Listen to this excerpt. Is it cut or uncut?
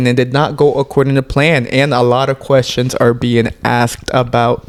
uncut